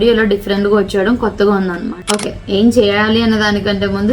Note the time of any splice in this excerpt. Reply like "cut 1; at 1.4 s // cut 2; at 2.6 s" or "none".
cut 1; at 2.0 s